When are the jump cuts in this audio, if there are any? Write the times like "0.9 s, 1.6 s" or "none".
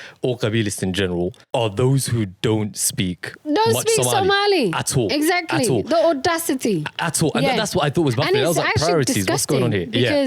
1.4 s